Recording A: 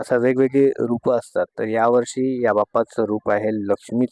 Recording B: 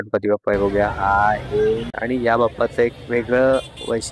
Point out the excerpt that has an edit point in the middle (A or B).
B